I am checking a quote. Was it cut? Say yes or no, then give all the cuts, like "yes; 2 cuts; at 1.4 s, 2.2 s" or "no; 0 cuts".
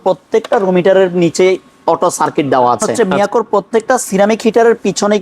yes; 1 cut; at 3.1 s